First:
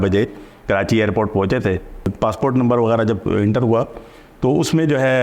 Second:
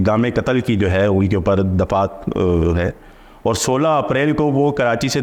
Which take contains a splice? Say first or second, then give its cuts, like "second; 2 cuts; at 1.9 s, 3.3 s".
first; 1 cut; at 2.1 s